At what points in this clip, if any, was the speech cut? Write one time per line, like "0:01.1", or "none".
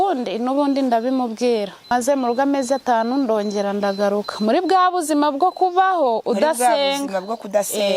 0:01.9